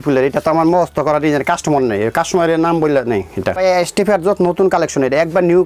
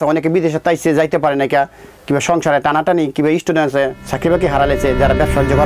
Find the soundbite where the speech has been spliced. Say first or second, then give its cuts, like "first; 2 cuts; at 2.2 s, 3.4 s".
first; 1 cut; at 3.5 s